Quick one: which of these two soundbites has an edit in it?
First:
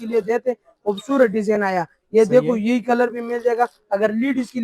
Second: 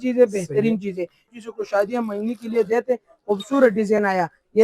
second; 1 cut; at 1.2 s

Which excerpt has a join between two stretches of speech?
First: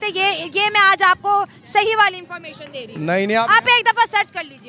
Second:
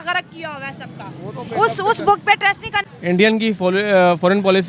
second; 1 cut; at 2.8 s

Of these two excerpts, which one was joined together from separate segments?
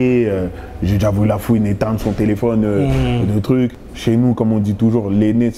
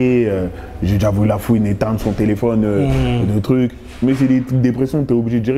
first; 1 cut; at 3.8 s

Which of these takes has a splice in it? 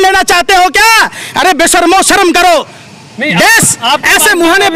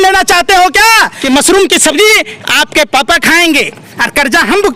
second; 1 cut; at 1.1 s

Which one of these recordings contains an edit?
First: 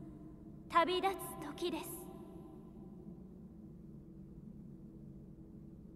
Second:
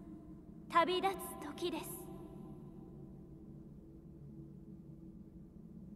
first; 2 cuts; at 2.0 s, 4.9 s

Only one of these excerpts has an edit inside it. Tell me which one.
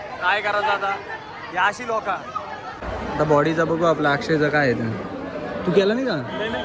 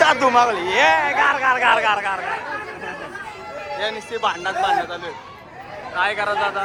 first; 1 cut; at 2.7 s

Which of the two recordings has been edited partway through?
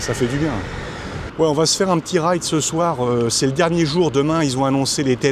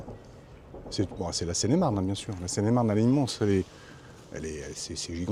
first; 1 cut; at 1.2 s

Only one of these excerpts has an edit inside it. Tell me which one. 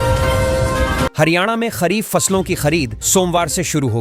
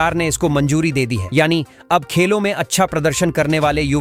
first; 1 cut; at 1.1 s

